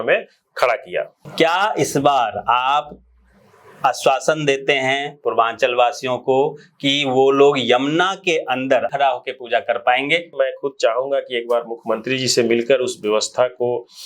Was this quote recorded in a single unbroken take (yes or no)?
no